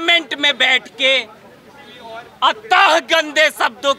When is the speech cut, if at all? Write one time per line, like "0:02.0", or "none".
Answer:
none